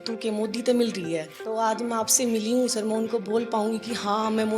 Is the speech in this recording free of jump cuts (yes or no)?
no